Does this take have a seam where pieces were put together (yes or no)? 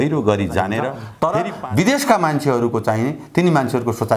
yes